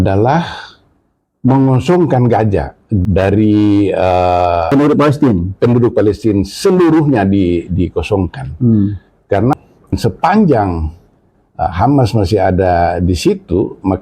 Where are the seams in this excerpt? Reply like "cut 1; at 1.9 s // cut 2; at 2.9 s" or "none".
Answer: cut 1; at 3.0 s // cut 2; at 4.7 s // cut 3; at 9.9 s